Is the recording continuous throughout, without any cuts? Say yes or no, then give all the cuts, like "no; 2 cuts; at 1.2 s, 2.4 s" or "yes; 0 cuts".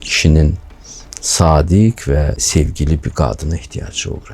no; 1 cut; at 2.4 s